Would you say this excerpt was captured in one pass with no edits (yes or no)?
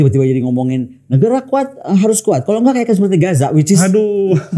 yes